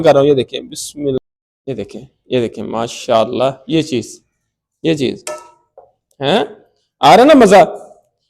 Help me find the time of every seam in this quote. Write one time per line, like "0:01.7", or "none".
0:01.2